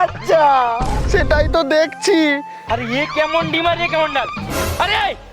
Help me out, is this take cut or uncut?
cut